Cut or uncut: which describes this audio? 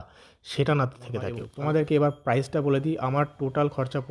cut